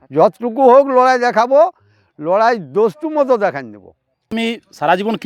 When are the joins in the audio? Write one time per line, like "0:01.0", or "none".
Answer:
0:04.3